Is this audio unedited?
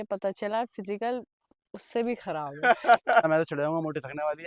no; 1 cut; at 3.2 s

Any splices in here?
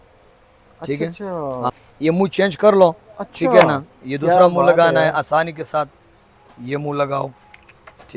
no; 0 cuts

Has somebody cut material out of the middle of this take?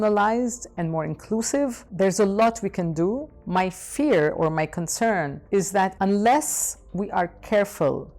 yes; 2 cuts; at 1.8 s, 5.8 s

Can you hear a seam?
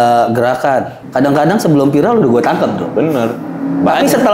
yes; 1 cut; at 1.0 s

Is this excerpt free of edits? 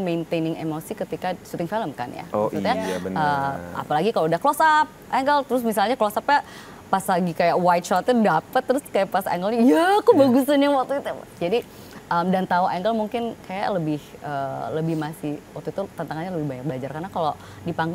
yes; 0 cuts

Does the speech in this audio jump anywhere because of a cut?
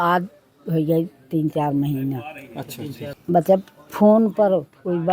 yes; 1 cut; at 3.1 s

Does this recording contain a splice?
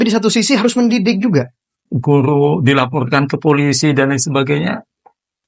yes; 1 cut; at 1.8 s

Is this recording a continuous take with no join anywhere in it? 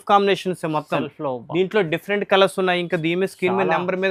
yes; 0 cuts

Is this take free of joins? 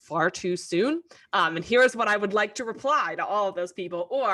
yes; 0 cuts

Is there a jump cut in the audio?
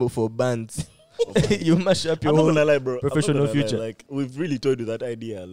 yes; 1 cut; at 4.0 s

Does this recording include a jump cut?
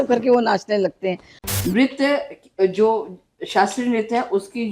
yes; 1 cut; at 1.3 s

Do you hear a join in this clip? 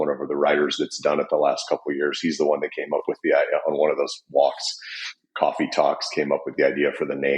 no; 0 cuts

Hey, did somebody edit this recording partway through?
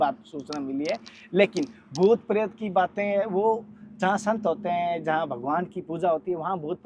no; 0 cuts

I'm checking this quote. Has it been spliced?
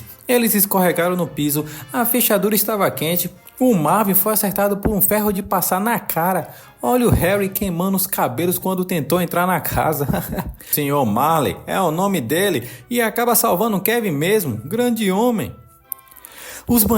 yes; 1 cut; at 10.7 s

